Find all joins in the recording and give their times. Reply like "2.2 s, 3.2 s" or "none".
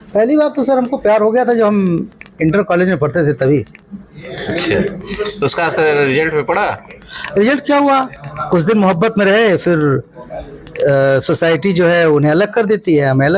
none

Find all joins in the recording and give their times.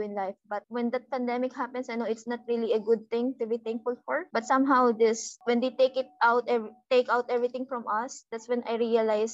none

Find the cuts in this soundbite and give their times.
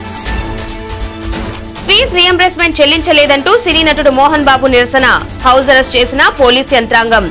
1.4 s

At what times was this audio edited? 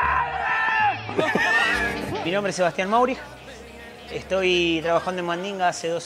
1.8 s

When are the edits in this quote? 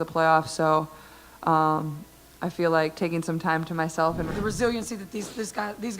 4.4 s

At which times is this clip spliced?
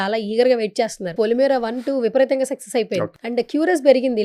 1.1 s, 3.2 s

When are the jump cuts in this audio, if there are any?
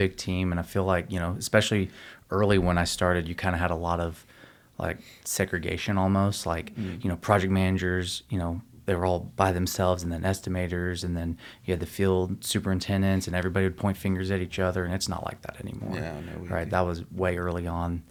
none

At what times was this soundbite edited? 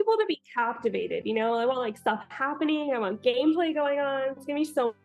none

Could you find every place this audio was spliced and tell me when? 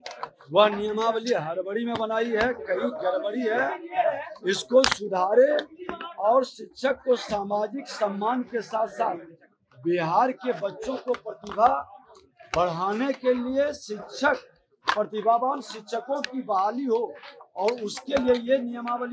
none

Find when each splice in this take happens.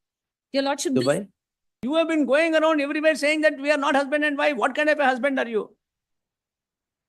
1.8 s

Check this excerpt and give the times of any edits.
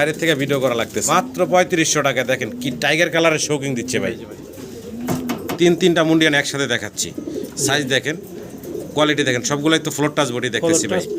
1.0 s, 5.6 s

